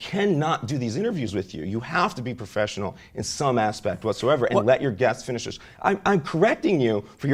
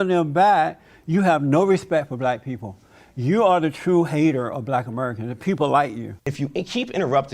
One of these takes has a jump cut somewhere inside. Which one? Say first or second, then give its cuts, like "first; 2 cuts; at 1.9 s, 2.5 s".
second; 1 cut; at 6.2 s